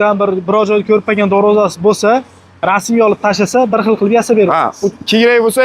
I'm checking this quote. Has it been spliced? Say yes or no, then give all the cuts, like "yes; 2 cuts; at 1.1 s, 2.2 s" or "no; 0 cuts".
no; 0 cuts